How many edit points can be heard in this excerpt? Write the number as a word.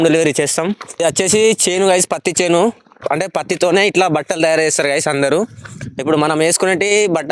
two